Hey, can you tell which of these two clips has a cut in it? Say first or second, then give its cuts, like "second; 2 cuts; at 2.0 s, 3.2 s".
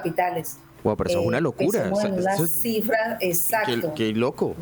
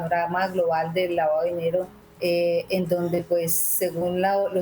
second; 1 cut; at 2.0 s